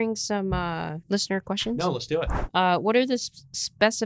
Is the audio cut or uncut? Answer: cut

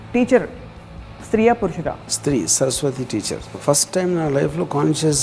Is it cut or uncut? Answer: cut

